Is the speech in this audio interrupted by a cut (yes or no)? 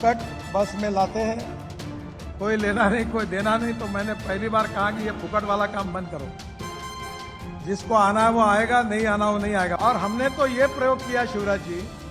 no